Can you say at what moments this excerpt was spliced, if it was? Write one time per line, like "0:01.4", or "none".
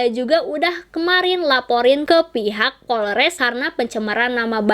0:03.4